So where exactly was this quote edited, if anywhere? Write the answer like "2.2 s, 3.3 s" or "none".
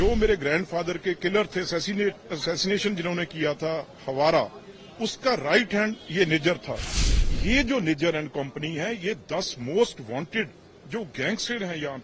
7.0 s